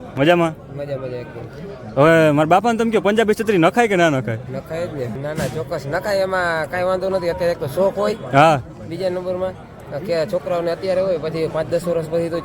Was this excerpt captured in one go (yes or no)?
no